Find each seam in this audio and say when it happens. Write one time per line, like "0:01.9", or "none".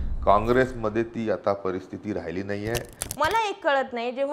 0:03.0